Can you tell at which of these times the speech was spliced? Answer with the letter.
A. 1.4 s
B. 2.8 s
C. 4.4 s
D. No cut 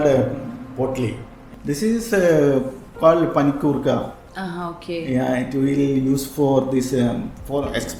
A